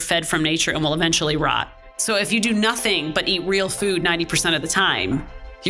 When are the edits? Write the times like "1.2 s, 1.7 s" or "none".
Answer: 2.3 s